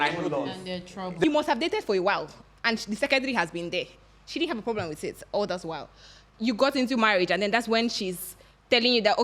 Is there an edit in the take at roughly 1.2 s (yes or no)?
yes